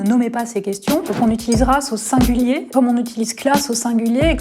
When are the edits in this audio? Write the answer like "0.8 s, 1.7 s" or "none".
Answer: 1.1 s, 2.7 s